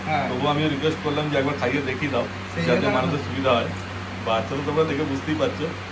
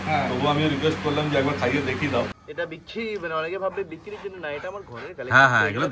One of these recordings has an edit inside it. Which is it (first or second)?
second